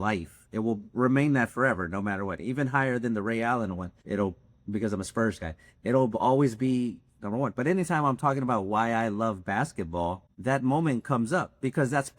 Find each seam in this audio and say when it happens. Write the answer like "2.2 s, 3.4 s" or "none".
3.9 s, 10.3 s